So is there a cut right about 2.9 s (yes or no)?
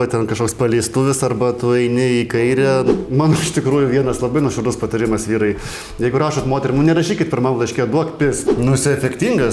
yes